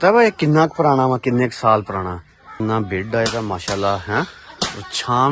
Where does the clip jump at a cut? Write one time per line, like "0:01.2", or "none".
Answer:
0:02.6